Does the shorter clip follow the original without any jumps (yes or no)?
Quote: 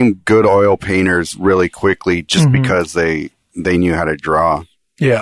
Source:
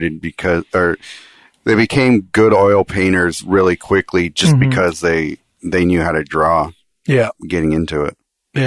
yes